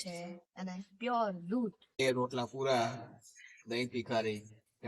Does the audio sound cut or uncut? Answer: cut